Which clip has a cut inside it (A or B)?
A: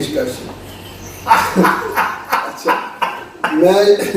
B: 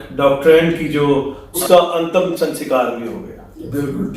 B